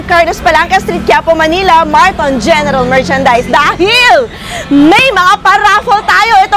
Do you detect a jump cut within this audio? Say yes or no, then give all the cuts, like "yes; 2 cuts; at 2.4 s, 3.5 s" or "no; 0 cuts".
no; 0 cuts